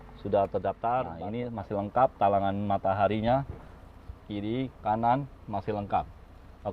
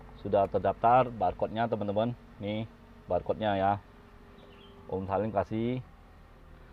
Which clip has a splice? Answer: first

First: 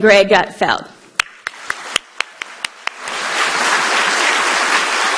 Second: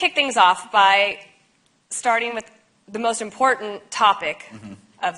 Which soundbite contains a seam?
second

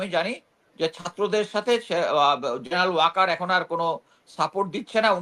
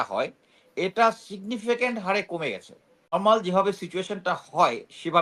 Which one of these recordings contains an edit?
second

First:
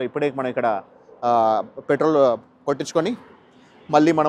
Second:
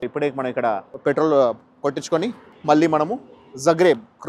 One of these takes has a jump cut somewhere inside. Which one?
second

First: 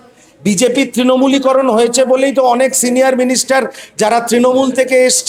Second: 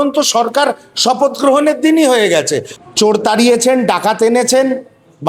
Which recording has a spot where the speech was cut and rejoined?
second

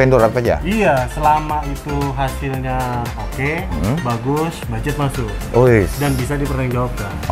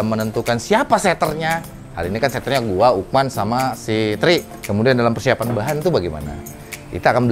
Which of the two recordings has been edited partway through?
second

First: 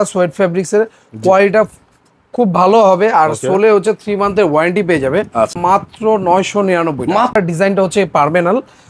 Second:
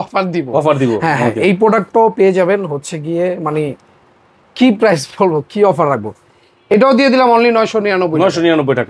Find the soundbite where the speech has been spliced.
first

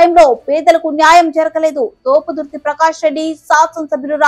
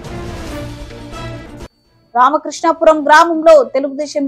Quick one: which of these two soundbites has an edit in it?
second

